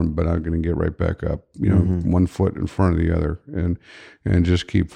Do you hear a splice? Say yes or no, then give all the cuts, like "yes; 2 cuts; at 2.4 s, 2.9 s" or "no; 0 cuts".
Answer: no; 0 cuts